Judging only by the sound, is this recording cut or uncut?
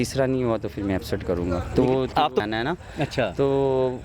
cut